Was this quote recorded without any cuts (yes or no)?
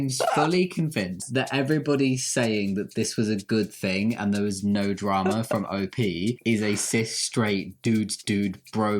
no